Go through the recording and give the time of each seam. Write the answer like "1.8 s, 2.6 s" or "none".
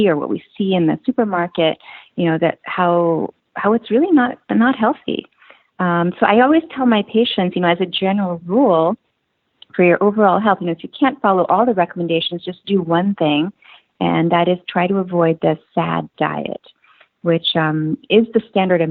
none

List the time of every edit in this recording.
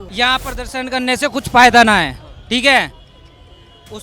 none

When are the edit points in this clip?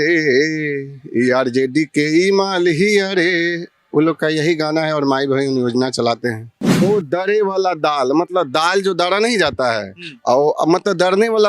6.8 s

